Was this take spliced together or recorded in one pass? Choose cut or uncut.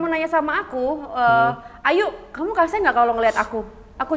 uncut